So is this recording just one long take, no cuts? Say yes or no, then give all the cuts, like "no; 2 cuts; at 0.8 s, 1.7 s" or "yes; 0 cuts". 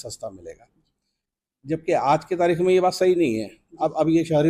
yes; 0 cuts